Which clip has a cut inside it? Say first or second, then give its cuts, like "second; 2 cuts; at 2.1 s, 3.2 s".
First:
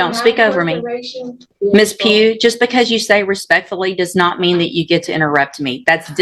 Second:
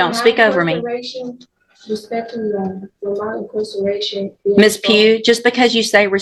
first; 1 cut; at 1.4 s